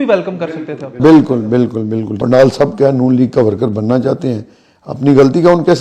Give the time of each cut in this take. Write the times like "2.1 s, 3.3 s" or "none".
2.1 s